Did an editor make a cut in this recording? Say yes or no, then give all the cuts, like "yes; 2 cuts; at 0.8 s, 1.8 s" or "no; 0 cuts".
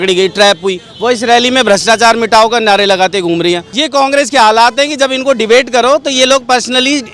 yes; 1 cut; at 3.7 s